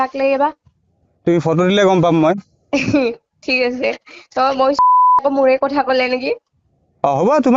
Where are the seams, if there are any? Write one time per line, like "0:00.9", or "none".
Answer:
0:05.1